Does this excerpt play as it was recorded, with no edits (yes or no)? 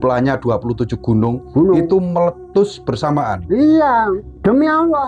no